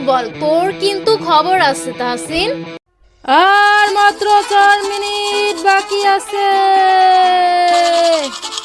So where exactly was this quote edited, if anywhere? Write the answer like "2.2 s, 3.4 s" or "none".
none